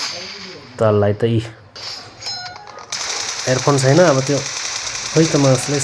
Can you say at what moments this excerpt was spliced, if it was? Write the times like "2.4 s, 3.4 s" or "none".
1.6 s